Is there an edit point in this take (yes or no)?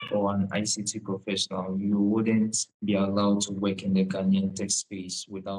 no